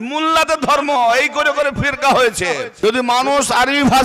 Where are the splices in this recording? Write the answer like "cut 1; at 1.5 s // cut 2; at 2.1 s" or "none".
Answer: cut 1; at 2.7 s

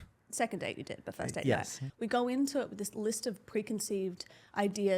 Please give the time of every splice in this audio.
cut 1; at 1.8 s

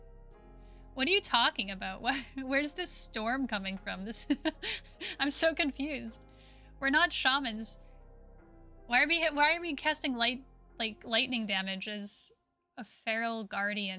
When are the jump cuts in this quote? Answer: none

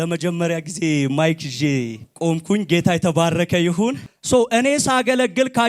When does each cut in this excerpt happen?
cut 1; at 2.0 s // cut 2; at 4.1 s

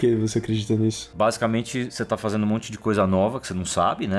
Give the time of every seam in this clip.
cut 1; at 1.0 s // cut 2; at 1.9 s

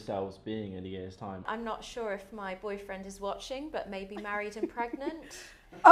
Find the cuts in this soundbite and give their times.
cut 1; at 1.5 s

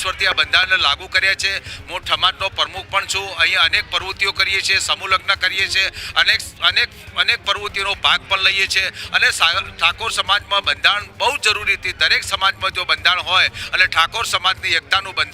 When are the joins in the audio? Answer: none

